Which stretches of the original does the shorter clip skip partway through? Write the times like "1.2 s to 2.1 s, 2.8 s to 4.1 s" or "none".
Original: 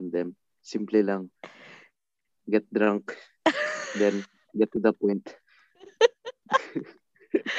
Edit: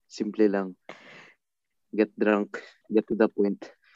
3.2 s to 4.3 s